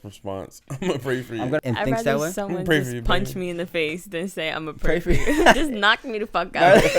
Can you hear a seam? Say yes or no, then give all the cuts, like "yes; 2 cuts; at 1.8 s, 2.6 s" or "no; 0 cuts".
yes; 2 cuts; at 1.6 s, 5.6 s